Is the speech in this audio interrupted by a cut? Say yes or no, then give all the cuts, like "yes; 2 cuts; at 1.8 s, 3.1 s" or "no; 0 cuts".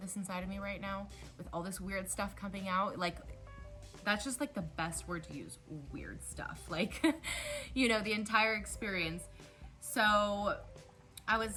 no; 0 cuts